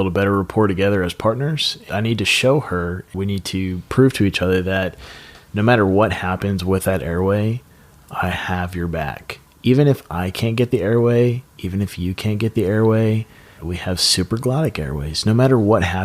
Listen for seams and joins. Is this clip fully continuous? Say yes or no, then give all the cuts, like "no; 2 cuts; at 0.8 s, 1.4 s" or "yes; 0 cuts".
no; 3 cuts; at 1.9 s, 3.1 s, 13.7 s